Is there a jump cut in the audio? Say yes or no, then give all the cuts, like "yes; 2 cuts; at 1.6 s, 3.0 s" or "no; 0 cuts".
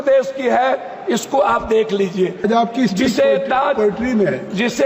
yes; 1 cut; at 2.4 s